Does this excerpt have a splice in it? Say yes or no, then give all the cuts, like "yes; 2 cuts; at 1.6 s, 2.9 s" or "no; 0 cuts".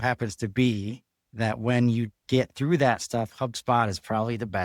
no; 0 cuts